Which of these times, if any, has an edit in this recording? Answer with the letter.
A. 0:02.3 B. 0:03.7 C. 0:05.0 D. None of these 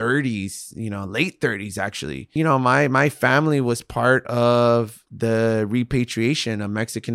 A